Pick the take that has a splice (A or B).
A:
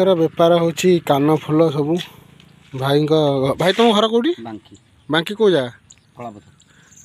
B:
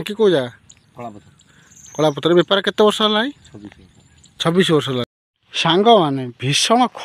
B